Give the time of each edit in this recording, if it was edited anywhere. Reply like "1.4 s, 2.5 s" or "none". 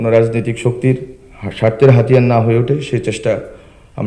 none